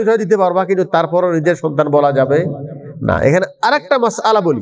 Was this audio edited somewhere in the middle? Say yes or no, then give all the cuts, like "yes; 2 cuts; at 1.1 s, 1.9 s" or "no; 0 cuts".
no; 0 cuts